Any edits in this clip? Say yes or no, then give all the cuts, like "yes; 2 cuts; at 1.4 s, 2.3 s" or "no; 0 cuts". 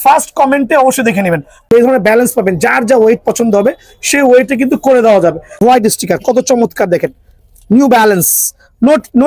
yes; 2 cuts; at 1.6 s, 5.6 s